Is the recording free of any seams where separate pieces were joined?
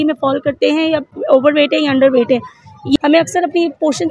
no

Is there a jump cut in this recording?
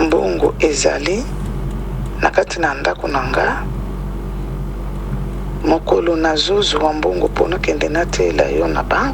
no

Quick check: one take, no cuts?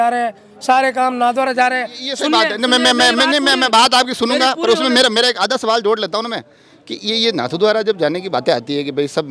yes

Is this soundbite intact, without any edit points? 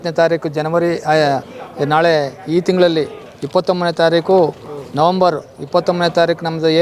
yes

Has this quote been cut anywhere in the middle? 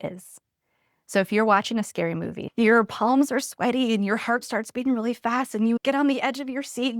yes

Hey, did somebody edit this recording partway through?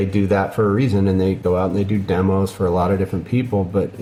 no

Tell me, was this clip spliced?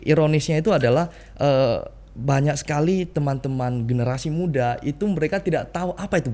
no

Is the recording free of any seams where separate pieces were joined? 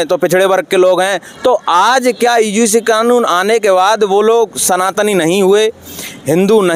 yes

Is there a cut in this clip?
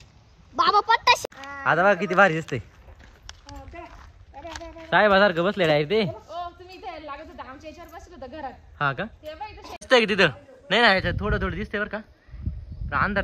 yes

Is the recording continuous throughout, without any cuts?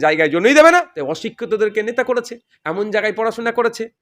no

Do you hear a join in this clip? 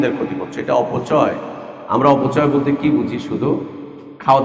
no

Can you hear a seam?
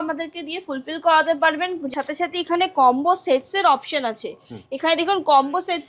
yes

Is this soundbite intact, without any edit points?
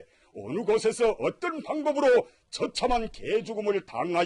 yes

